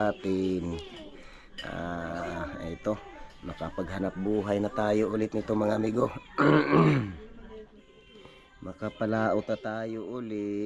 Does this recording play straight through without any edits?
yes; 0 cuts

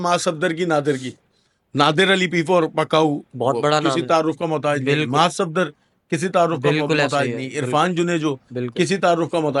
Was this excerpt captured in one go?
yes; 0 cuts

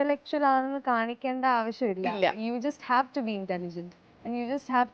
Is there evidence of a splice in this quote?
no; 0 cuts

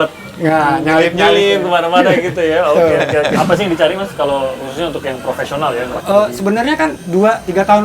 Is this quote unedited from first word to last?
no; 3 cuts; at 3.3 s, 6.0 s, 7.0 s

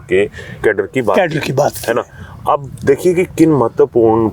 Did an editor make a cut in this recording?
no; 0 cuts

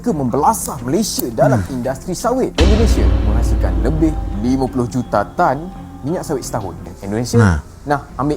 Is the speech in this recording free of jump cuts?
no; 1 cut; at 6.9 s

